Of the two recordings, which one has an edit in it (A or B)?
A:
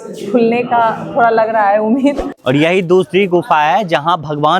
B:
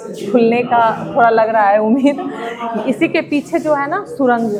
A